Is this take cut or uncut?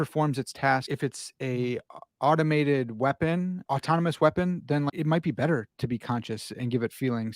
cut